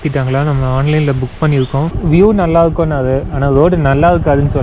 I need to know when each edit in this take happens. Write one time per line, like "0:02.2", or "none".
0:02.0